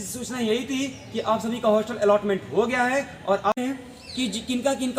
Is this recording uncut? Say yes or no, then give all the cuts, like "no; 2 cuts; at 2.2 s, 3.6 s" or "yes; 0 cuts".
no; 1 cut; at 3.5 s